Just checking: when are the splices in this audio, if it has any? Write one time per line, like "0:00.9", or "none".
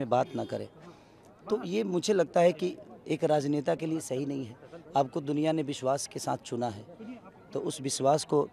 none